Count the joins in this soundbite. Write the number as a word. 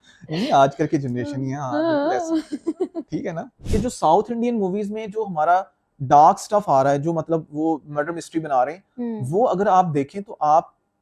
one